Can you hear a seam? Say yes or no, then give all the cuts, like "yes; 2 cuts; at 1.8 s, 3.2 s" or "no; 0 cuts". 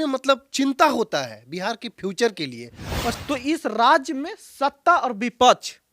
yes; 1 cut; at 3.2 s